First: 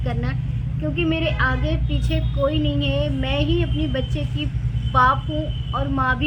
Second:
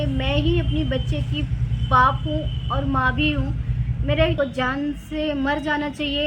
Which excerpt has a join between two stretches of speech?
second; 1 cut; at 4.3 s

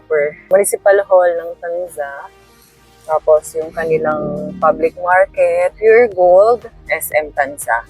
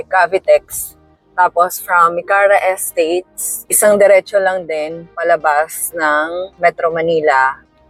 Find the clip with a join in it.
first; 2 cuts; at 5.7 s, 6.9 s

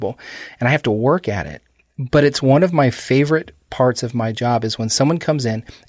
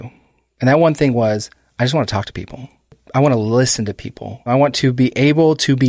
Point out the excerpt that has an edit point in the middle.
second; 2 cuts; at 3.0 s, 4.5 s

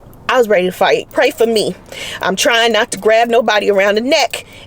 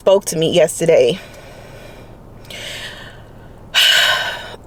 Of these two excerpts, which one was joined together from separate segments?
first; 1 cut; at 1.1 s

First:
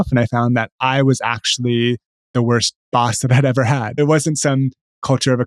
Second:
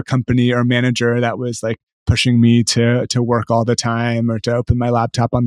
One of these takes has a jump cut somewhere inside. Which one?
first; 2 cuts; at 2.8 s, 3.9 s

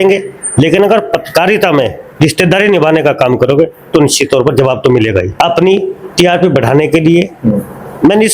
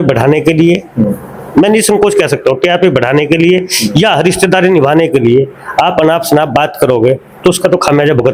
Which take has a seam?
first; 1 cut; at 5.3 s

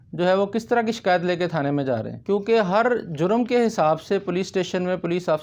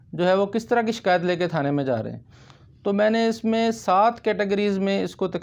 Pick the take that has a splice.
first; 1 cut; at 2.1 s

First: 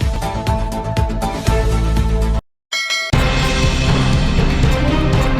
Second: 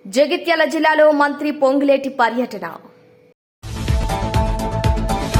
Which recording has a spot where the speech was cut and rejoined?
first; 1 cut; at 2.4 s

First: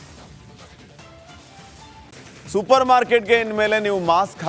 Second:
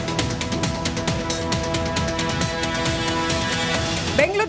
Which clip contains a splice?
first; 1 cut; at 2.1 s

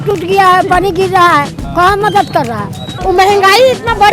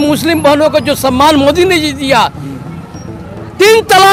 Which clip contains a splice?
first; 1 cut; at 2.8 s

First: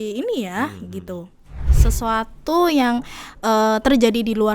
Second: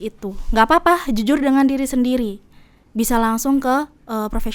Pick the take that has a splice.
first; 1 cut; at 1.8 s

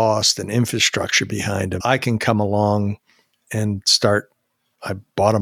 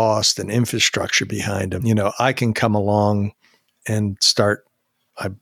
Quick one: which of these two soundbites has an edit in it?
first; 1 cut; at 1.8 s

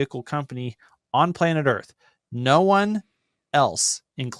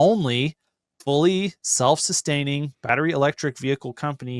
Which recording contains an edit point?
second; 1 cut; at 2.8 s

